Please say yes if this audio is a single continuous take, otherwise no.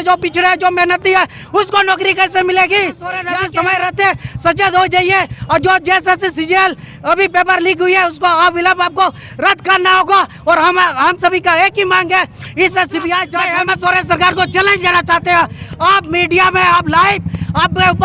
no